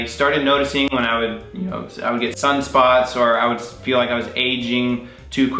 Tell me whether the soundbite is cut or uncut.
uncut